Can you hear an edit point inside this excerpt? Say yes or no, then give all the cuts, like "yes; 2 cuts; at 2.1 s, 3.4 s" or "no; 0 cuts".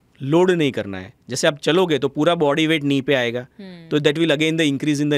no; 0 cuts